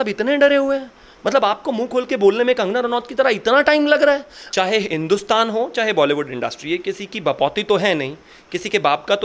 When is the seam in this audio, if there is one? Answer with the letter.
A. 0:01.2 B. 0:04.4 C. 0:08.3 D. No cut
B